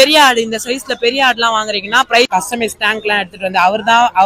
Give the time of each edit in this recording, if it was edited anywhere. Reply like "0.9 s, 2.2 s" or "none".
2.3 s